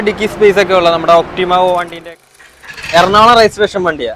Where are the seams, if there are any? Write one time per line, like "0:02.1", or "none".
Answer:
0:02.2